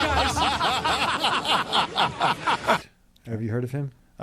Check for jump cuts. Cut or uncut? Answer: uncut